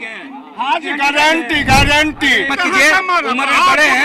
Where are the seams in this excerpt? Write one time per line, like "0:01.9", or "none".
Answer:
0:02.5